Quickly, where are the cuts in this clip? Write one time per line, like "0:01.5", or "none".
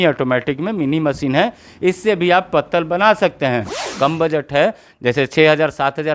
0:03.9